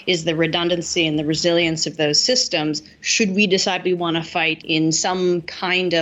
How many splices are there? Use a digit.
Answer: 1